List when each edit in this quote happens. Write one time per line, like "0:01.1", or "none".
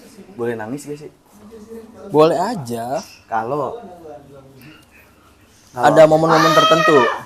none